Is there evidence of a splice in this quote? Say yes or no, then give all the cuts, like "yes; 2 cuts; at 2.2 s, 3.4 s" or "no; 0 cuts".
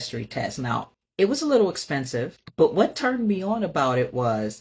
yes; 2 cuts; at 1.0 s, 2.4 s